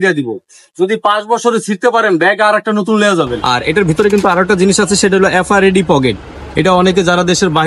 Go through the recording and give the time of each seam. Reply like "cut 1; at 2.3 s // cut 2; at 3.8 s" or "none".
cut 1; at 3.4 s